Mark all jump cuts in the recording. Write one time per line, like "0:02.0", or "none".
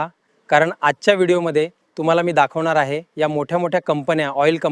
none